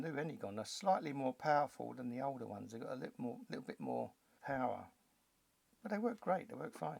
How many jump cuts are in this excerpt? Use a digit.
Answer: 1